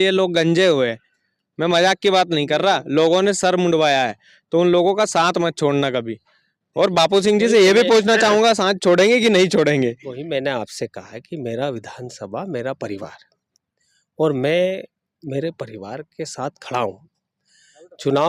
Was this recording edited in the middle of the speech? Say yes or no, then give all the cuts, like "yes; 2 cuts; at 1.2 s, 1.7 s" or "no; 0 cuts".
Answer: no; 0 cuts